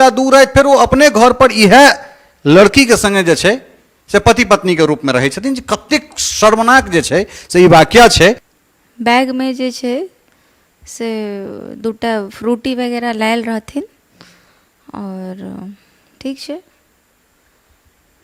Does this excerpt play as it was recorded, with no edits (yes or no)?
no